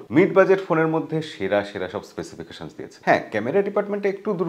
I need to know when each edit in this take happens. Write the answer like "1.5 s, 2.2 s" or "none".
none